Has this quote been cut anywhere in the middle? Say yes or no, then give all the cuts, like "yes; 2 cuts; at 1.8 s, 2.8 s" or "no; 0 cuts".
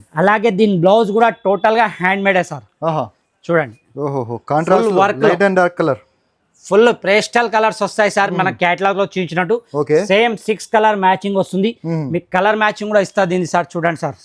no; 0 cuts